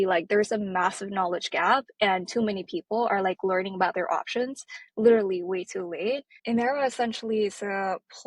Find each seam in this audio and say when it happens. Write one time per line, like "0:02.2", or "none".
0:06.3